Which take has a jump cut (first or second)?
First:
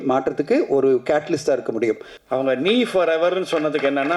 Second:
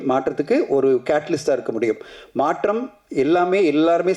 first